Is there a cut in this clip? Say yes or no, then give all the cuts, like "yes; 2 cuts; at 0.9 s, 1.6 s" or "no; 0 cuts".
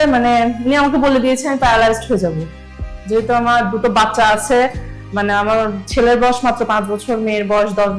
no; 0 cuts